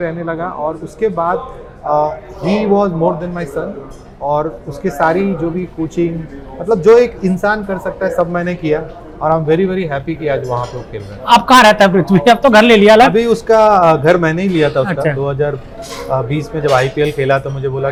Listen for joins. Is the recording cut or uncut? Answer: uncut